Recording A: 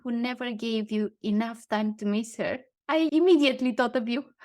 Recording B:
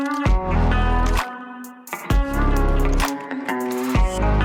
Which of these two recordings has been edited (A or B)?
A